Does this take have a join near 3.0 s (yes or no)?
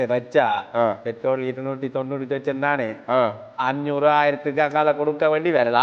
no